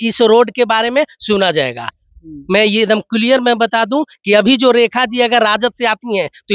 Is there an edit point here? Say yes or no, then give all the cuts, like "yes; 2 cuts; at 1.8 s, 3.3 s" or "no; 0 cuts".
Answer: no; 0 cuts